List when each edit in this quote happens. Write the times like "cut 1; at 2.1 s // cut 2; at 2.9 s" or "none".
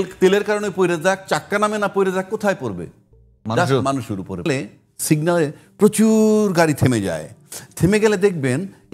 cut 1; at 4.5 s

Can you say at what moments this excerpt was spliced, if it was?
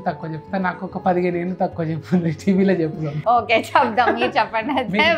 cut 1; at 3.1 s

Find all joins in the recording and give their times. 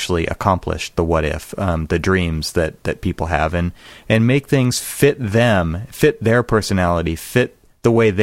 none

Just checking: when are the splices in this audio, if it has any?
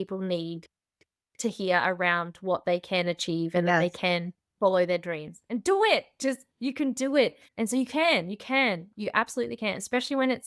cut 1; at 7.4 s

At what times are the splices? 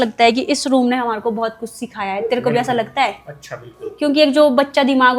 none

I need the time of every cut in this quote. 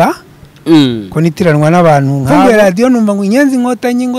cut 1; at 2.2 s

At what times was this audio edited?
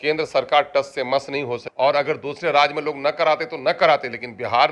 cut 1; at 1.6 s

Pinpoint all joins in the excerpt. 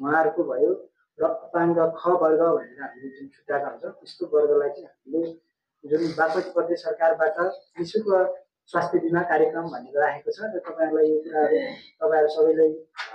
none

